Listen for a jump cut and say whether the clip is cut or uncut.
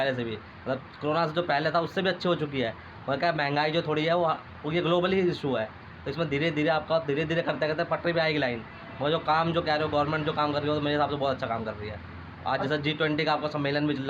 uncut